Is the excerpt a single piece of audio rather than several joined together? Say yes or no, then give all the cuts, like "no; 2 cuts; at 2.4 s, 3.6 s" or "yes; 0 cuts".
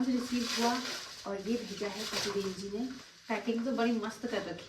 no; 1 cut; at 3.0 s